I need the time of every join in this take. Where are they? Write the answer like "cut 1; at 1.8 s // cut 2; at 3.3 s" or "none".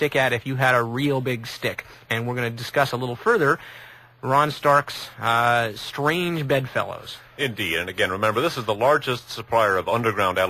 none